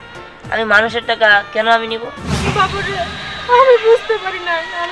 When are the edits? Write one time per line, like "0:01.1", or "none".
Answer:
0:02.3